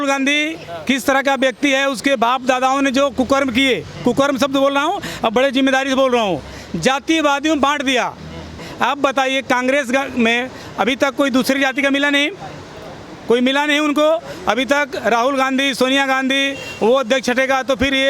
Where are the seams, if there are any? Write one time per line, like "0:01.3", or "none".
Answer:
0:08.6